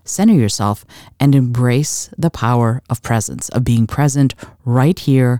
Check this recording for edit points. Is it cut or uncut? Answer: uncut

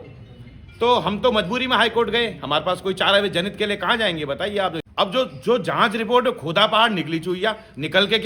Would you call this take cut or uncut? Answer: cut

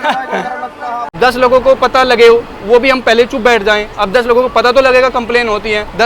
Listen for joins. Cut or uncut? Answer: cut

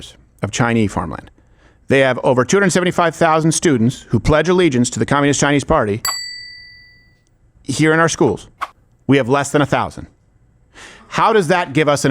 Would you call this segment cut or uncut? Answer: uncut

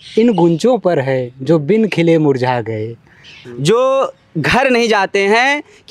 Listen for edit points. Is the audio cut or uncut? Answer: cut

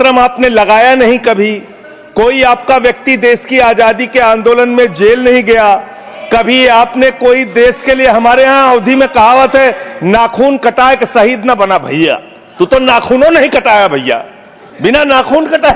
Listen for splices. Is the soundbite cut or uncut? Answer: uncut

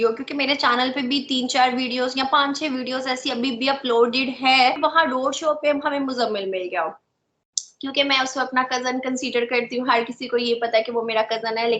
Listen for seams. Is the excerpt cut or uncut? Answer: cut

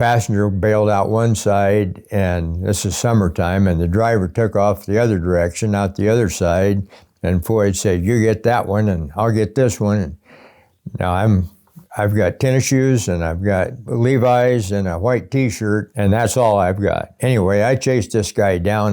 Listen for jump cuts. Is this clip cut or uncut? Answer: cut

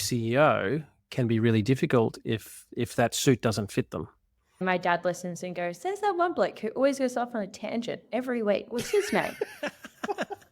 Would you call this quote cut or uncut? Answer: cut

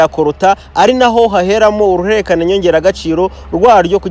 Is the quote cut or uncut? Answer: uncut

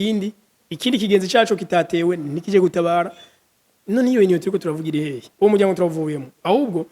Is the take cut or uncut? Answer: cut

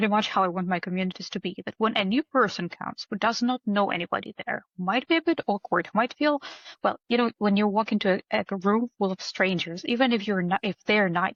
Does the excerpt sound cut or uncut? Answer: uncut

